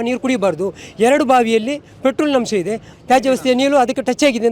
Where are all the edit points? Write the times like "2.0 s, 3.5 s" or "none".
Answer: 2.9 s